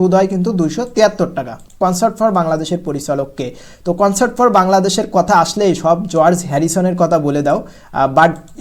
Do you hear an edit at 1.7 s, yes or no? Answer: yes